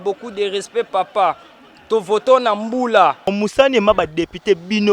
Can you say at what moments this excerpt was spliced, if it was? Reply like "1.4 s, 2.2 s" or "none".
3.3 s